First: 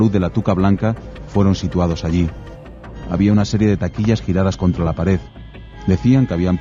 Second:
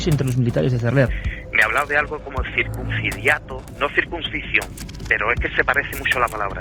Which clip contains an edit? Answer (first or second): second